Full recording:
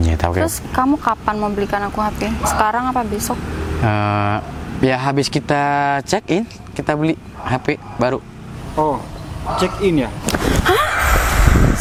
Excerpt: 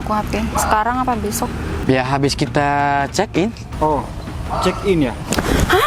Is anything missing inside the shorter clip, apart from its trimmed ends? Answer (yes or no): yes